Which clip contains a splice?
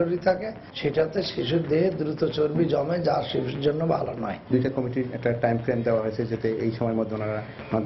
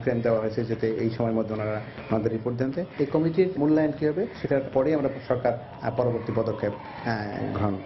first; 1 cut; at 4.4 s

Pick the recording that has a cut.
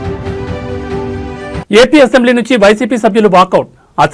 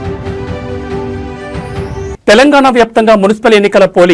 first; 1 cut; at 1.6 s

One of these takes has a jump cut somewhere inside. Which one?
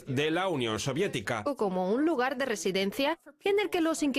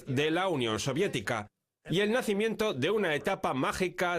second; 1 cut; at 1.4 s

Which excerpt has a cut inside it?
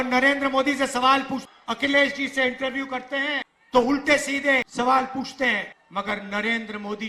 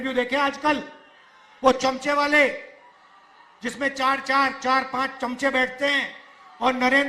first; 4 cuts; at 1.4 s, 3.5 s, 4.7 s, 5.8 s

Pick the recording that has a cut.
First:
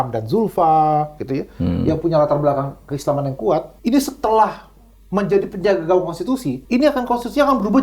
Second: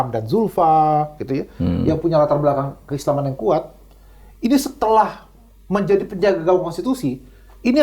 first; 2 cuts; at 3.7 s, 6.5 s

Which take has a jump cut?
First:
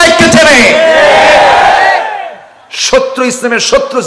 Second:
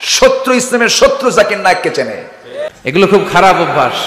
second; 1 cut; at 2.5 s

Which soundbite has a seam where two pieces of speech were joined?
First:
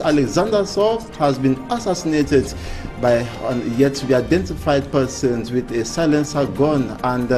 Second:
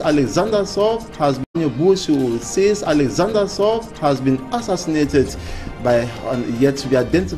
first; 1 cut; at 1.4 s

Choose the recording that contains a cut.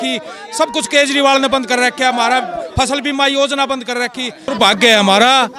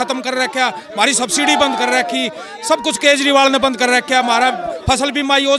first; 1 cut; at 4.4 s

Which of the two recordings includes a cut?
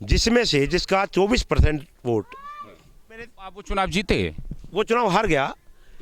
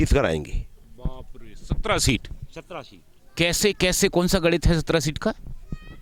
first; 1 cut; at 3.5 s

